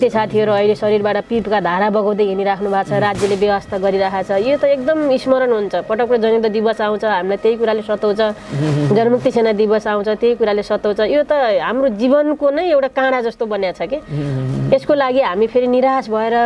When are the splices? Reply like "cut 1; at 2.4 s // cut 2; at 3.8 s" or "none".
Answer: none